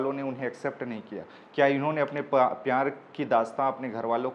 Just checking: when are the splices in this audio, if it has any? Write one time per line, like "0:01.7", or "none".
none